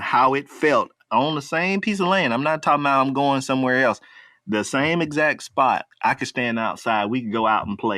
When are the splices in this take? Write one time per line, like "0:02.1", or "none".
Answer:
0:01.0
0:05.8